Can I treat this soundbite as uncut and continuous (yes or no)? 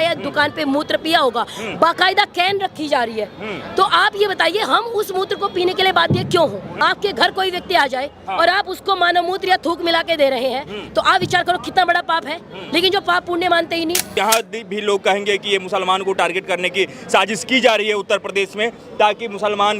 no